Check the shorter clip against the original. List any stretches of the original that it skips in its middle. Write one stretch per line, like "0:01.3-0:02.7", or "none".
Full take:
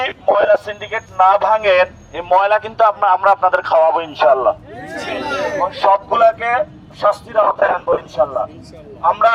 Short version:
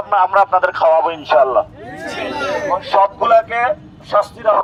none

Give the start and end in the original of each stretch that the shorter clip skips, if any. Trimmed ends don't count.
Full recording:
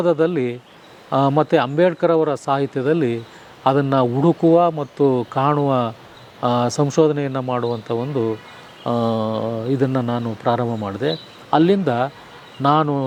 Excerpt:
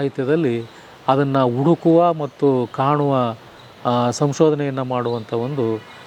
none

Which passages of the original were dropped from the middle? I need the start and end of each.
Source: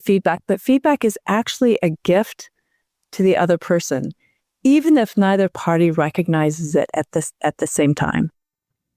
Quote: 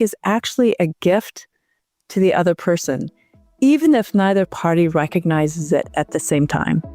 0:06.9-0:07.3

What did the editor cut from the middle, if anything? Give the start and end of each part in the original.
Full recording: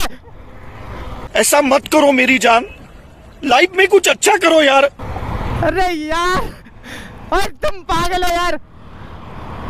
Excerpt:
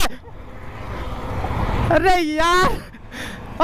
0:01.3-0:05.0

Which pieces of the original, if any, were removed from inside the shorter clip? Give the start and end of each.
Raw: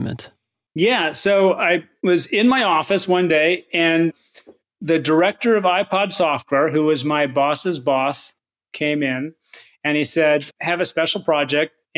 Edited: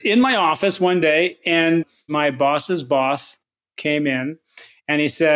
0:04.4-0:07.0

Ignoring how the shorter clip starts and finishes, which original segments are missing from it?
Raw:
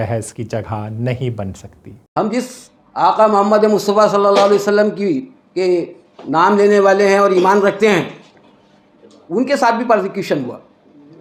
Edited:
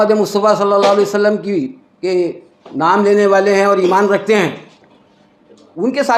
none

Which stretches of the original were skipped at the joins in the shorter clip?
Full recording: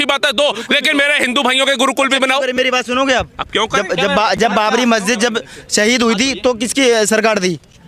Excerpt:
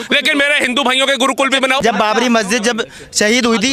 0:02.4-0:04.4

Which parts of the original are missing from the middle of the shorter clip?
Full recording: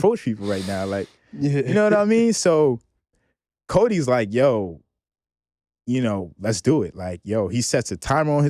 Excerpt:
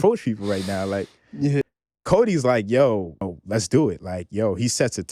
0:01.6-0:03.3
0:05.0-0:06.3

